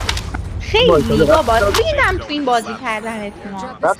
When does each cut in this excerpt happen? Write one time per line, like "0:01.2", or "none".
none